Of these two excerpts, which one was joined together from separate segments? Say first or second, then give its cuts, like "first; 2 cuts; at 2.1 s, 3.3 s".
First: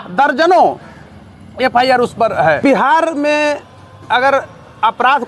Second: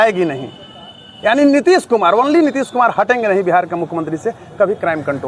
first; 1 cut; at 2.6 s